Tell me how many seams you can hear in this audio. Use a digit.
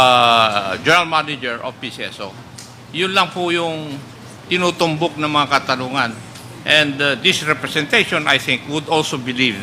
0